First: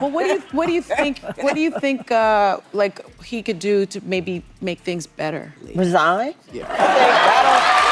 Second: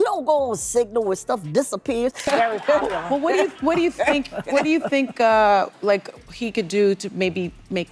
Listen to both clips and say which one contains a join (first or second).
second